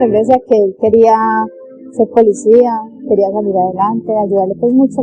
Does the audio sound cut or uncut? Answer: uncut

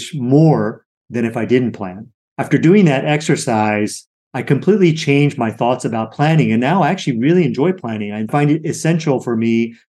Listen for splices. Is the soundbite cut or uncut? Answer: cut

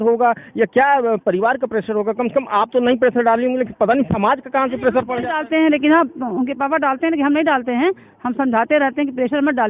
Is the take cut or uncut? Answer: uncut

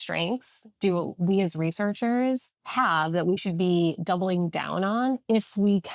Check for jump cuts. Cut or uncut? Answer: cut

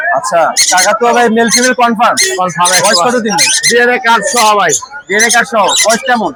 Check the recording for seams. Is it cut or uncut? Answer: uncut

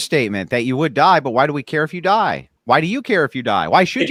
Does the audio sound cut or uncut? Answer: uncut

